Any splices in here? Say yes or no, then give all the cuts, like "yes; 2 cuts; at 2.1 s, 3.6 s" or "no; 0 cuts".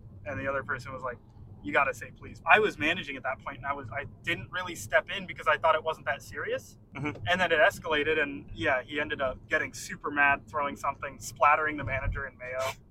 yes; 5 cuts; at 2.3 s, 4.2 s, 6.8 s, 8.4 s, 9.4 s